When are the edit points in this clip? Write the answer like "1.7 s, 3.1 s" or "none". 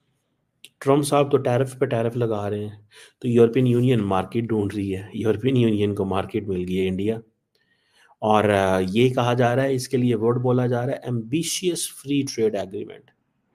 none